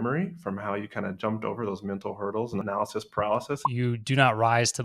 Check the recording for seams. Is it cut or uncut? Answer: cut